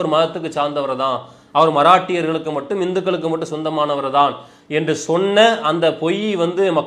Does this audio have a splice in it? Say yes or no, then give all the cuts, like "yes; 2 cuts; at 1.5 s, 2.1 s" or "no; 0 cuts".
no; 0 cuts